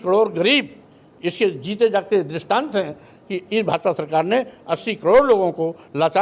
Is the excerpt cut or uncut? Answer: uncut